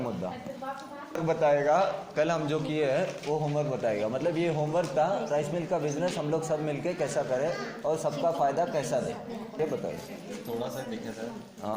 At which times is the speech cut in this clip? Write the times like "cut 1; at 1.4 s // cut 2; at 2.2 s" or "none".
cut 1; at 1.2 s // cut 2; at 9.6 s